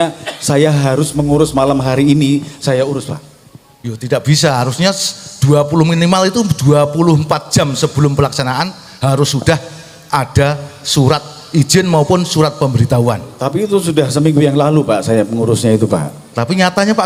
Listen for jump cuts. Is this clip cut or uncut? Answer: uncut